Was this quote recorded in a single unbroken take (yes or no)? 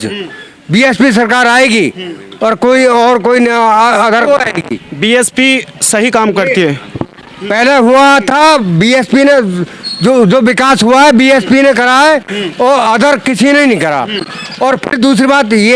no